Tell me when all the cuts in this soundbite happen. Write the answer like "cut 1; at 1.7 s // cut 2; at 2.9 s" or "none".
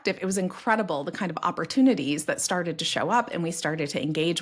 none